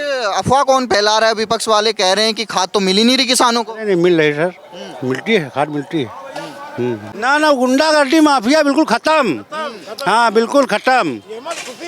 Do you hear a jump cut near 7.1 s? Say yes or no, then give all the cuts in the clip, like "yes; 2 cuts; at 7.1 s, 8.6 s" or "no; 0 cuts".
yes; 1 cut; at 7.1 s